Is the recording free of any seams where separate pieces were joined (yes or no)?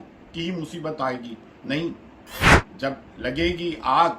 yes